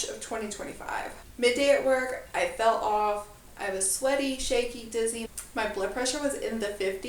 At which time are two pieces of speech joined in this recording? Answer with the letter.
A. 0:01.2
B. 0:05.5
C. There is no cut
C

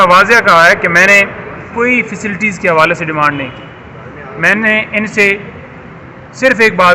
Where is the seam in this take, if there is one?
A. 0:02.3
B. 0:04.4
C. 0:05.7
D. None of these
D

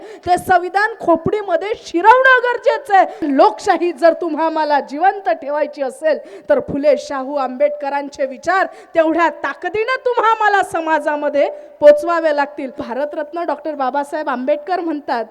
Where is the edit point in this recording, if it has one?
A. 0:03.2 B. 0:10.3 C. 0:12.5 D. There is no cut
A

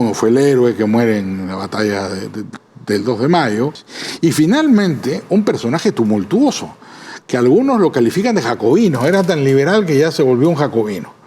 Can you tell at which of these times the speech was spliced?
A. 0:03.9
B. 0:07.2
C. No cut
A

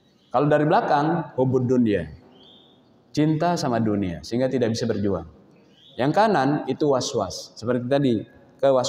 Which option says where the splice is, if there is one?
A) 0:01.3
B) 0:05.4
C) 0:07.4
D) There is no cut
D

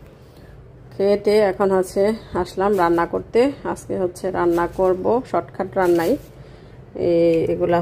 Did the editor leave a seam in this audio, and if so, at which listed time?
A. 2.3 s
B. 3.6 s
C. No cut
C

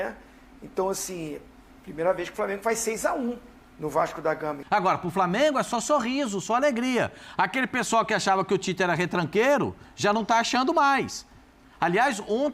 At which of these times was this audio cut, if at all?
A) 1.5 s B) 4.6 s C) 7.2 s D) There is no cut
B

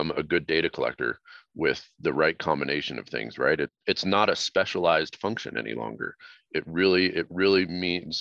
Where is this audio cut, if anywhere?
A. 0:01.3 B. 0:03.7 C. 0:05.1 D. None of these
B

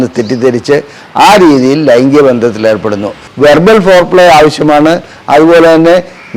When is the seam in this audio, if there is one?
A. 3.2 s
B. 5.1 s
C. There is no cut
A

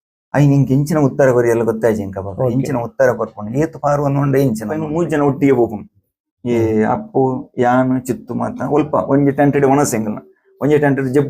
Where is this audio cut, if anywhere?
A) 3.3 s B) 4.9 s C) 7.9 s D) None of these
B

